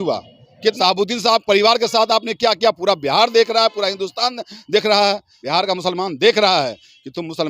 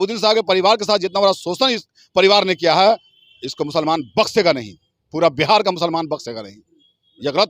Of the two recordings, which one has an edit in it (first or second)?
first